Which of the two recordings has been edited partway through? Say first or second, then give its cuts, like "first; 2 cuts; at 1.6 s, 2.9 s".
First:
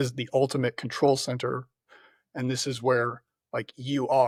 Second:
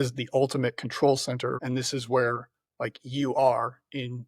second; 1 cut; at 1.6 s